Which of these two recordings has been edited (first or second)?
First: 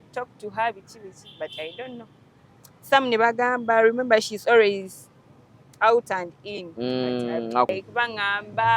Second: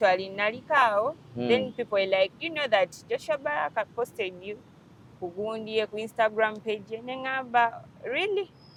first